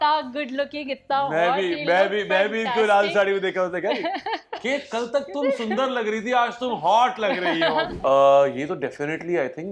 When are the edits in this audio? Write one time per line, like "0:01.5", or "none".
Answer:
0:07.9